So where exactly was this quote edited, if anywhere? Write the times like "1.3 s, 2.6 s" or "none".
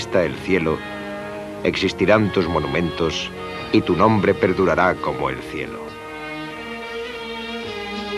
none